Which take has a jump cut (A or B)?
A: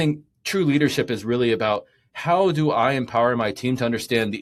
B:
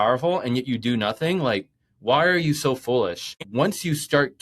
B